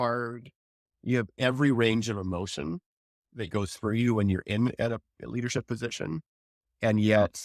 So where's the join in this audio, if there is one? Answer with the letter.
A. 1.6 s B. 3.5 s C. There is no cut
B